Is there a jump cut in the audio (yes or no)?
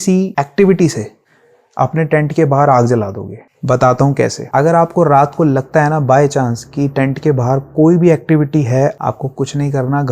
yes